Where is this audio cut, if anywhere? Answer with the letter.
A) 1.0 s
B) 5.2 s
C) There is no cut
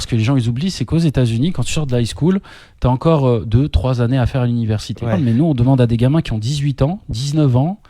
B